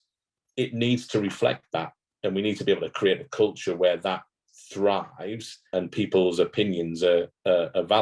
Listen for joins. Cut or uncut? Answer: cut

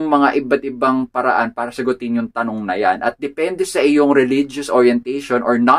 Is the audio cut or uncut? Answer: uncut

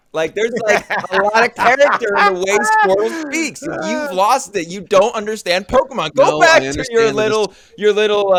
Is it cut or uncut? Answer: uncut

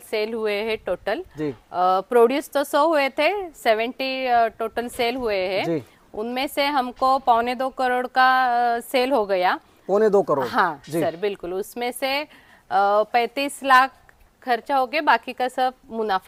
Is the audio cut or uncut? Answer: uncut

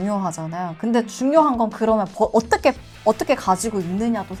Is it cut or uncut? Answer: uncut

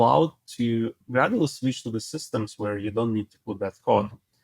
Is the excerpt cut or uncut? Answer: cut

